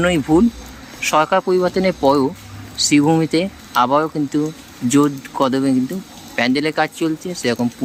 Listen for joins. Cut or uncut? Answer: uncut